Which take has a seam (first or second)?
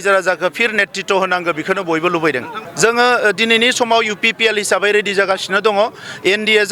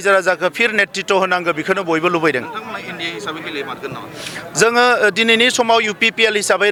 first